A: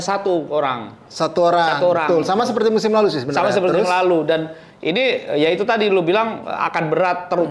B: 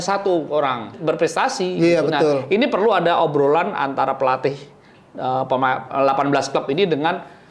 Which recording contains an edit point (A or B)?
B